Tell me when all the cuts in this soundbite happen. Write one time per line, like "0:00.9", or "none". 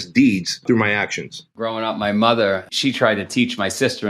0:01.1
0:02.7